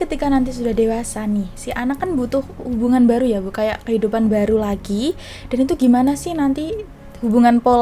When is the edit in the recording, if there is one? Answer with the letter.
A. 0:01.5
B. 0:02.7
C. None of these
C